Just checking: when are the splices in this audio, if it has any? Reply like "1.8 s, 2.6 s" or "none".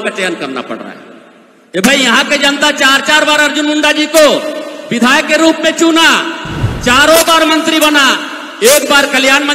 none